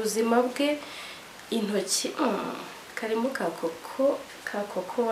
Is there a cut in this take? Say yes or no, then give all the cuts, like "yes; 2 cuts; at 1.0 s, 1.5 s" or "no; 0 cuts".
no; 0 cuts